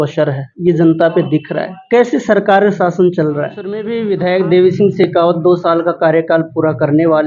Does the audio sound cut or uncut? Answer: cut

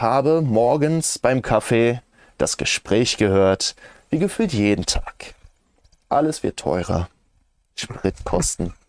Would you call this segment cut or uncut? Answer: uncut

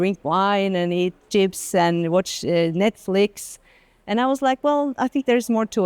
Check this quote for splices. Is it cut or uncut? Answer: uncut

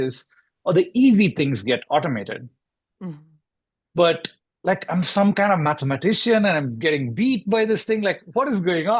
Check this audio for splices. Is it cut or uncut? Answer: uncut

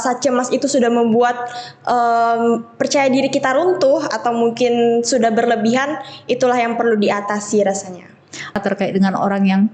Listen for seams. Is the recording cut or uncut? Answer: cut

